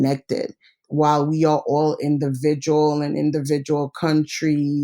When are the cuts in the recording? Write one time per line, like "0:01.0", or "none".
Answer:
0:00.9